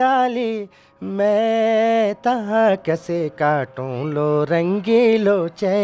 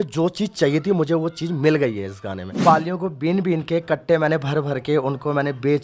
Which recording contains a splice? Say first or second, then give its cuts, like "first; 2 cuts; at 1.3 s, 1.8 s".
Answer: second; 1 cut; at 2.6 s